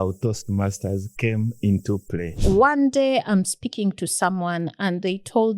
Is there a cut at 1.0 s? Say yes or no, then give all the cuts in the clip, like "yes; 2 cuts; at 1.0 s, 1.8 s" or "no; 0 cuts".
no; 1 cut; at 2.3 s